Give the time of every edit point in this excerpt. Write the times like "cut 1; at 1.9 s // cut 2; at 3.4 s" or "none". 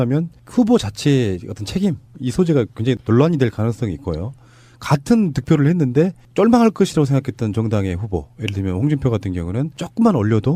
cut 1; at 8.2 s